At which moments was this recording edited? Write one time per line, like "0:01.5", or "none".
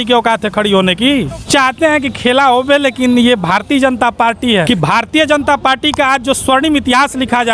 0:01.5
0:04.7